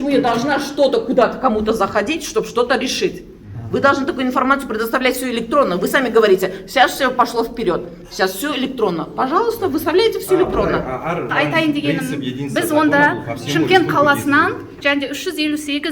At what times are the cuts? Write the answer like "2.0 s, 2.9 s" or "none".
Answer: 11.3 s